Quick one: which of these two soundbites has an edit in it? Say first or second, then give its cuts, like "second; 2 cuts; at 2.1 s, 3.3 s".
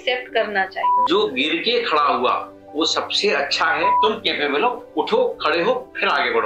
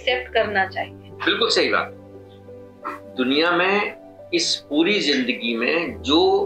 first; 2 cuts; at 0.9 s, 3.9 s